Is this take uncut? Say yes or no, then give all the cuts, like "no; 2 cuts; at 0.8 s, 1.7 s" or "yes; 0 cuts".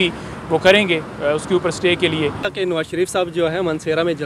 no; 1 cut; at 2.5 s